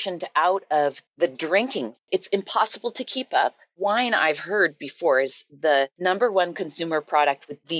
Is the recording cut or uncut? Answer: cut